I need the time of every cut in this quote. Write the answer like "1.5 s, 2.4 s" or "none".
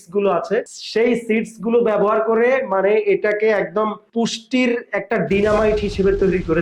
none

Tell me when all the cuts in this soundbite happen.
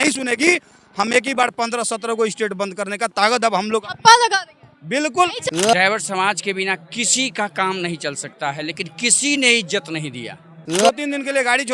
5.5 s, 10.6 s

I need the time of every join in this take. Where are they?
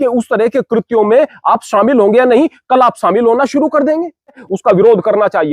4.4 s

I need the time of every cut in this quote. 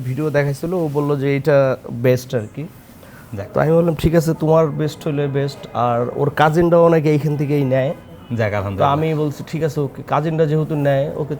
none

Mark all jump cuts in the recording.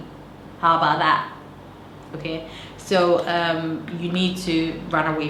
none

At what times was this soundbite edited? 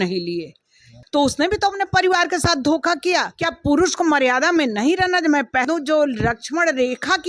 0.9 s, 3.4 s, 5.6 s

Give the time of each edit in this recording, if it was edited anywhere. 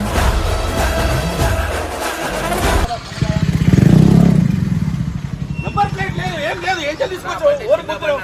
none

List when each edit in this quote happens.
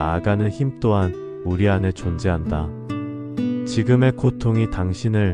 2.5 s, 3.7 s

